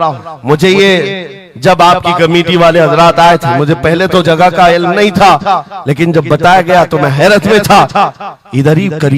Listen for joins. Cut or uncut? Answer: uncut